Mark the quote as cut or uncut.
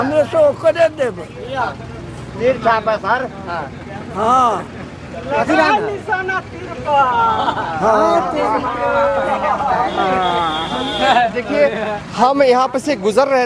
uncut